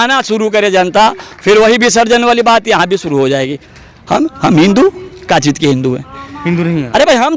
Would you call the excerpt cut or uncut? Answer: cut